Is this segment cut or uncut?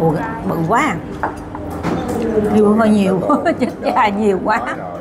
uncut